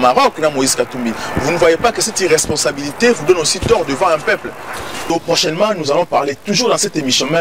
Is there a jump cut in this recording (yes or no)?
yes